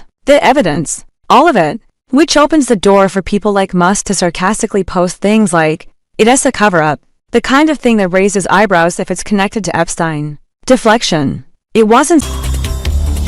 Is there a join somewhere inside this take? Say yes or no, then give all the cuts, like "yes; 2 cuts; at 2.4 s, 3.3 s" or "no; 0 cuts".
yes; 1 cut; at 12.2 s